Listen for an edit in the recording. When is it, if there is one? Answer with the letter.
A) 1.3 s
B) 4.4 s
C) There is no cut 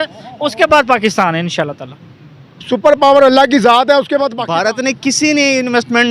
B